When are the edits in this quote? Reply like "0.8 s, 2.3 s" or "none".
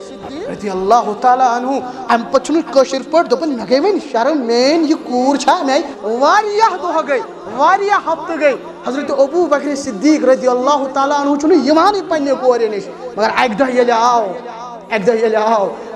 6.0 s